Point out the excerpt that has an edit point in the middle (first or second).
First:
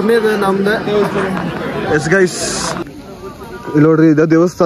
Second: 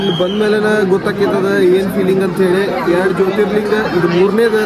first